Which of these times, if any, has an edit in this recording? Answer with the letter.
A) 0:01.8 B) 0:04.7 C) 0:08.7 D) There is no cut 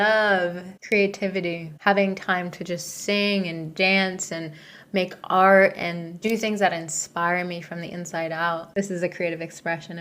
C